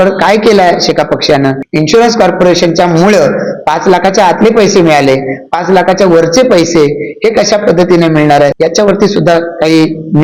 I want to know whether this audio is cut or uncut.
cut